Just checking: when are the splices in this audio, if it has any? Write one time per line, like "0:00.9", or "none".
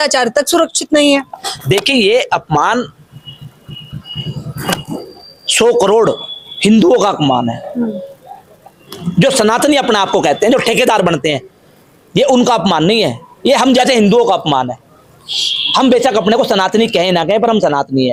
none